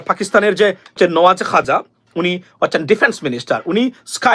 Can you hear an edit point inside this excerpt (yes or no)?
yes